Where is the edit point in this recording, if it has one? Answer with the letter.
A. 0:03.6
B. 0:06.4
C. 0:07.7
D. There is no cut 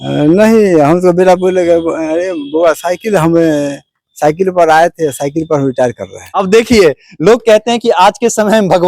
B